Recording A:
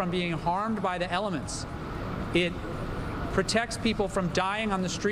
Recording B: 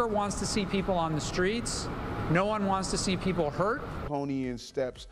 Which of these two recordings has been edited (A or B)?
B